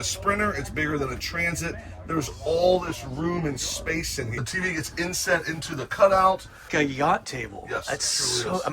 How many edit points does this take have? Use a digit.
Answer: 2